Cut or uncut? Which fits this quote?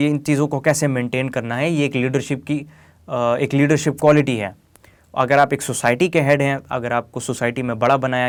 uncut